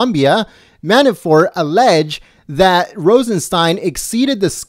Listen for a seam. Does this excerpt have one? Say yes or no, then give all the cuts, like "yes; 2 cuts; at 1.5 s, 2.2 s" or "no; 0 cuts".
yes; 1 cut; at 2.6 s